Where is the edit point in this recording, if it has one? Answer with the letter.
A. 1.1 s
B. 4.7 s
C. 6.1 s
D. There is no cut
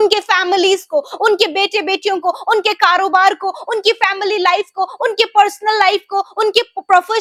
D